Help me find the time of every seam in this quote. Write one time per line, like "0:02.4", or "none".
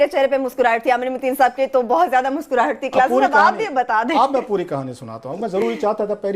0:04.3